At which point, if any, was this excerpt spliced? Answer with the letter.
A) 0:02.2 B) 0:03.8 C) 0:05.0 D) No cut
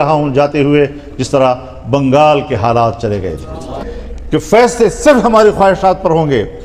B